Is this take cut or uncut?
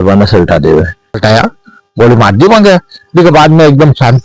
cut